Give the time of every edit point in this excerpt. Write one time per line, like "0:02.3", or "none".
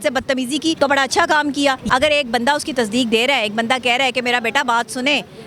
0:01.8